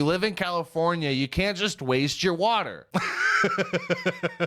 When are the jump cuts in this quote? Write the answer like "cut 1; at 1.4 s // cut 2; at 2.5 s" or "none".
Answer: cut 1; at 2.8 s

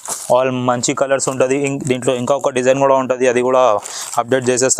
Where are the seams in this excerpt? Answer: none

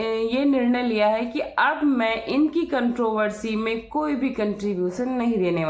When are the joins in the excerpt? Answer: none

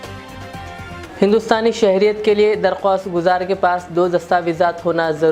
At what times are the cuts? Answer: none

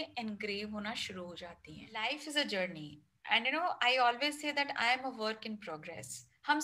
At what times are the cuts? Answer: cut 1; at 1.9 s

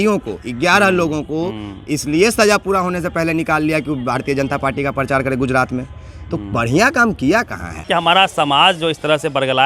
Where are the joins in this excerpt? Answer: cut 1; at 7.8 s

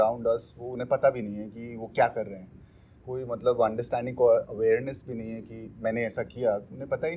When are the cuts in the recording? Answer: none

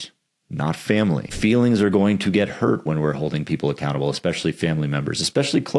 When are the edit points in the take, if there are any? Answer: cut 1; at 1.3 s

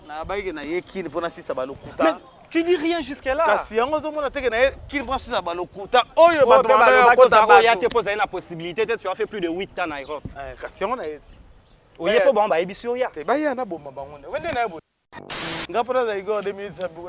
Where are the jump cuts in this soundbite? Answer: cut 1; at 15.1 s

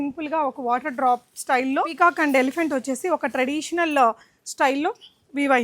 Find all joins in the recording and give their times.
cut 1; at 1.9 s

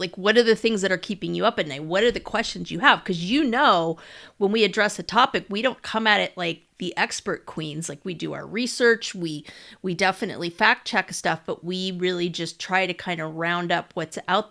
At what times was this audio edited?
none

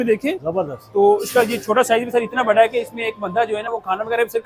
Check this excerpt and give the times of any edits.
none

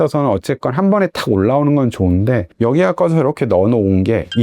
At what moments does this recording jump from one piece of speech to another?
cut 1; at 2.5 s

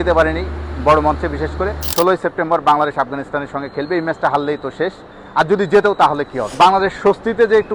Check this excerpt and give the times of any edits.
cut 1; at 1.8 s // cut 2; at 6.4 s

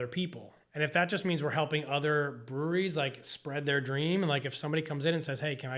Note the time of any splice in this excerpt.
none

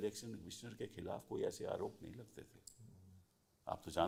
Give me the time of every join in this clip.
none

